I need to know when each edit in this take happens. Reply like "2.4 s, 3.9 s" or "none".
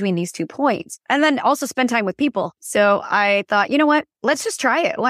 0.9 s, 2.6 s, 4.1 s